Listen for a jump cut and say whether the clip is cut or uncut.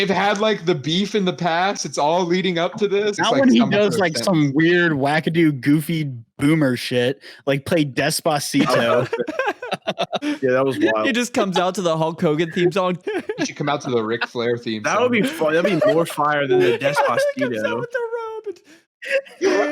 cut